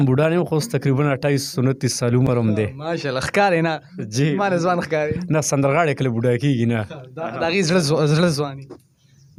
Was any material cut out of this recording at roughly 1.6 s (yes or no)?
no